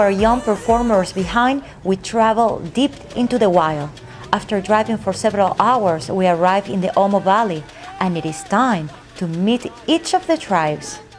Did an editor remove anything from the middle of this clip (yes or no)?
no